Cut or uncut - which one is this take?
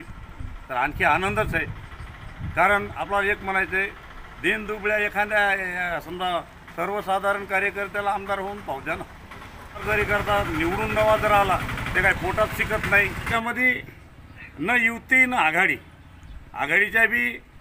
cut